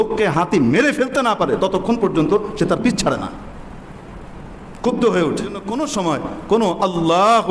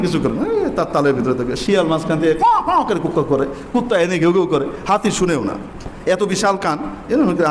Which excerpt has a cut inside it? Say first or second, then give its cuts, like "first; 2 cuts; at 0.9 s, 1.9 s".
first; 1 cut; at 5.7 s